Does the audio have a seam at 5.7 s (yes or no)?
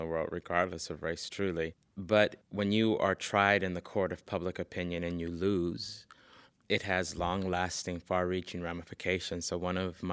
no